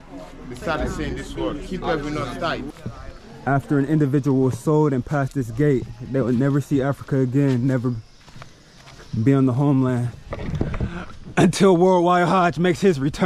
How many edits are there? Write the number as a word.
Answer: one